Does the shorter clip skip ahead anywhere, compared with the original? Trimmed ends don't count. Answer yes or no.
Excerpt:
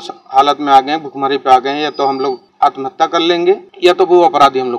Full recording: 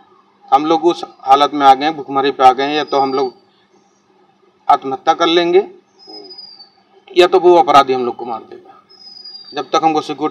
yes